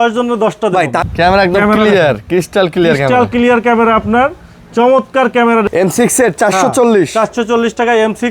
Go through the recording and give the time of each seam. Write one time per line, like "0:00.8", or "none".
0:01.0
0:05.7